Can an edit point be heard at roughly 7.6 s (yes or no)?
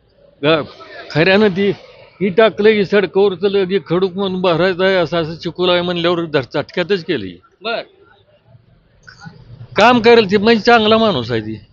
no